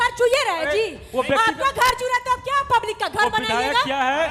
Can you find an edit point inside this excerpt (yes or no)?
no